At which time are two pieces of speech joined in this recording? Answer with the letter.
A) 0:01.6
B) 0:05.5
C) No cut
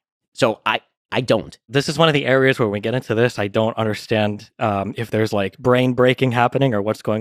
A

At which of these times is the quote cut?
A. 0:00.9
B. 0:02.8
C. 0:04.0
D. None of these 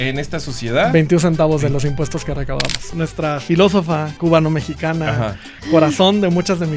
B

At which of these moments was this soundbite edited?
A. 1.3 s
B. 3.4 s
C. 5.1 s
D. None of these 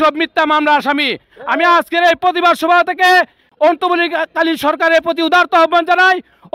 D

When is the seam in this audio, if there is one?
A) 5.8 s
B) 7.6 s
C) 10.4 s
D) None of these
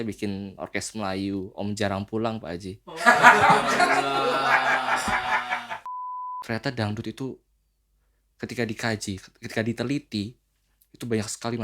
A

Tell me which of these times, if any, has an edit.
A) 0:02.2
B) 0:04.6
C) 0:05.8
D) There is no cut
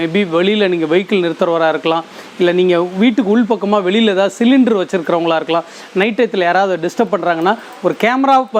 D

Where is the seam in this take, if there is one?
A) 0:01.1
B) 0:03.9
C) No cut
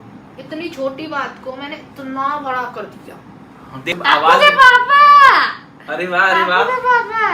B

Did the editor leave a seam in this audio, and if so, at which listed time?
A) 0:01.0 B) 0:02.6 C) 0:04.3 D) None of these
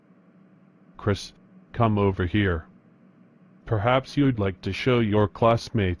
A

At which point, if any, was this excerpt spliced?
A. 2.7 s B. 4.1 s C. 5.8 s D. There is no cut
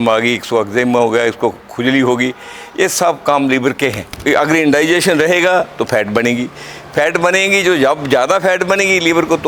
B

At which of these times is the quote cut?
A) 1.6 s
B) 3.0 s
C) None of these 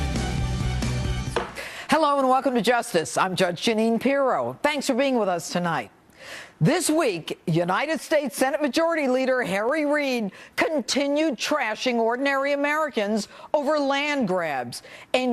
C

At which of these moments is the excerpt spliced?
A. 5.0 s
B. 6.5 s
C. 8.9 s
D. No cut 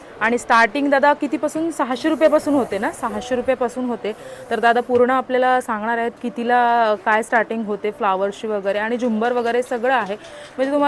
D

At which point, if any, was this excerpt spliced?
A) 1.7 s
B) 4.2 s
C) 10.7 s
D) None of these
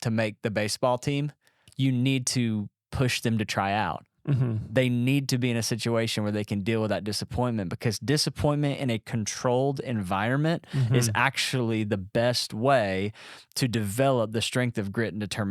A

